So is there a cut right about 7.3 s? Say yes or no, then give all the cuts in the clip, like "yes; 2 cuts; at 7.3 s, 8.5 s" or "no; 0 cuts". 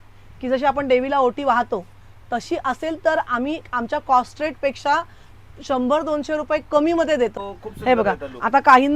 yes; 1 cut; at 7.3 s